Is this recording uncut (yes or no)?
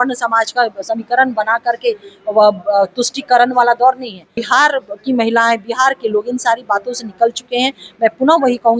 no